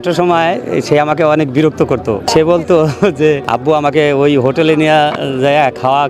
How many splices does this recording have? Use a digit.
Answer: 2